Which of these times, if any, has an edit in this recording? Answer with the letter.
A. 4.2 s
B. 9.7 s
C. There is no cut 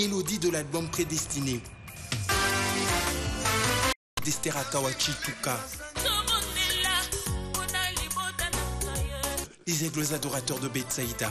A